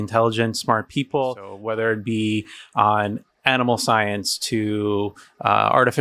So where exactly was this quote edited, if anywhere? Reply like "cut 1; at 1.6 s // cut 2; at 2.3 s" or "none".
cut 1; at 1.7 s